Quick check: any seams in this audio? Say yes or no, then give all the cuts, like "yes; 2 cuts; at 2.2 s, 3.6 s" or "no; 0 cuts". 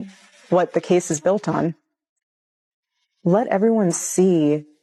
no; 0 cuts